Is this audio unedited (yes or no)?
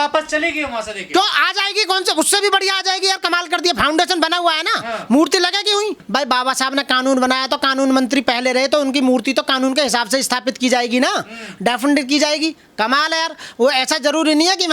no